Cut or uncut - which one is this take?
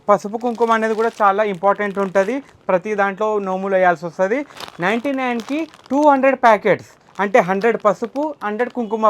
cut